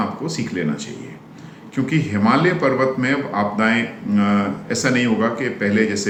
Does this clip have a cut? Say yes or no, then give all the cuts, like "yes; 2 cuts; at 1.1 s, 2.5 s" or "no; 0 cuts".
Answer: no; 0 cuts